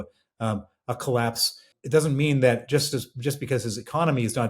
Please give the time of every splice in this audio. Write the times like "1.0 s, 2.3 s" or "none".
1.7 s